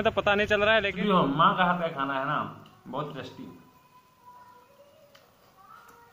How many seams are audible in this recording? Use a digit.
1